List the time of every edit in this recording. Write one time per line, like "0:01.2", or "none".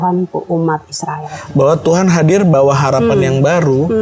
0:01.3